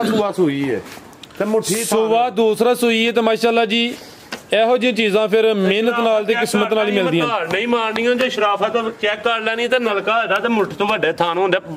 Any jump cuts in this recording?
no; 0 cuts

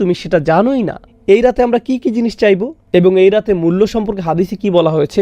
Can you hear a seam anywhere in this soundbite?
yes; 1 cut; at 1.0 s

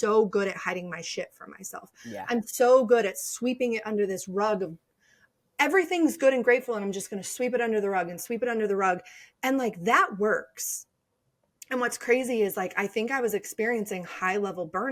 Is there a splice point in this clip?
no; 0 cuts

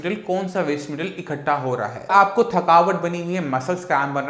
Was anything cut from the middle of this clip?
yes; 1 cut; at 2.1 s

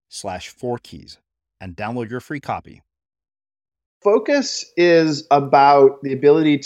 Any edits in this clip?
yes; 1 cut; at 4.0 s

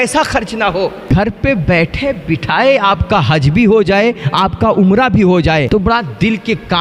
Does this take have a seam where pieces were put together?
yes; 1 cut; at 5.7 s

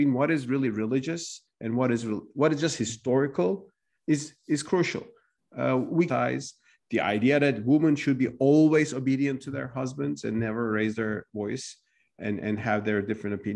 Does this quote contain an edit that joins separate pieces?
yes; 1 cut; at 6.1 s

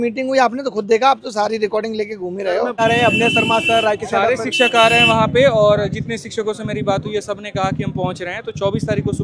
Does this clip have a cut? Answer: yes; 1 cut; at 2.8 s

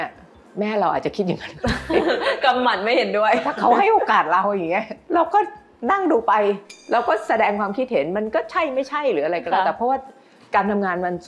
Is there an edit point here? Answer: no; 0 cuts

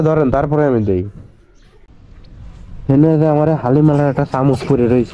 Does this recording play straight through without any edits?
no; 1 cut; at 2.1 s

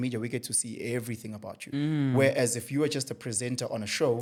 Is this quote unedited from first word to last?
yes; 0 cuts

